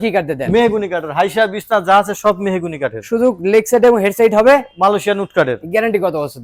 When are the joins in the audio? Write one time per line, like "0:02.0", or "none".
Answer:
none

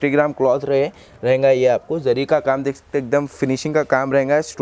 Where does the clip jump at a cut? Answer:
none

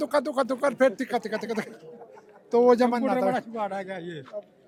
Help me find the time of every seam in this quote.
none

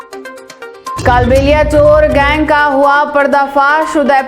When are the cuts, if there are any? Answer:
0:01.0

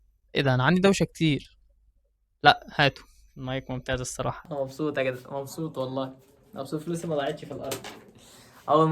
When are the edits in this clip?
0:04.4

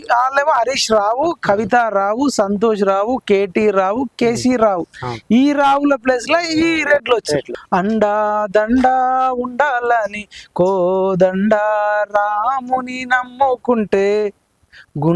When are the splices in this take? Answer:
0:07.6

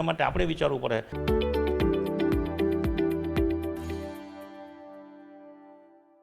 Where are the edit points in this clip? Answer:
0:01.1

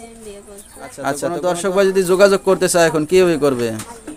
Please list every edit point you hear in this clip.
0:01.3

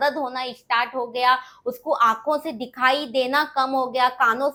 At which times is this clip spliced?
none

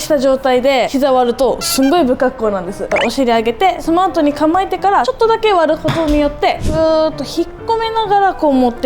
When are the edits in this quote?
0:00.9
0:02.8
0:03.8
0:05.1
0:06.6

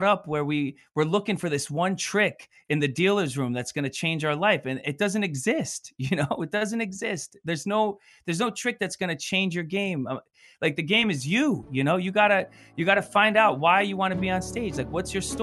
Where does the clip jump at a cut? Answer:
none

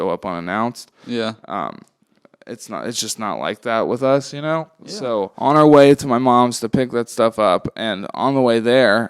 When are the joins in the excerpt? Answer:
0:05.3

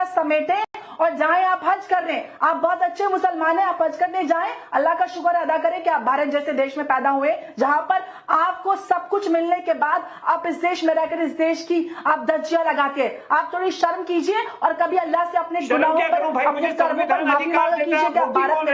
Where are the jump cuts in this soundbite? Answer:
none

